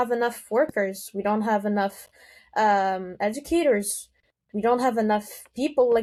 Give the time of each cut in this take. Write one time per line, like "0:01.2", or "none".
none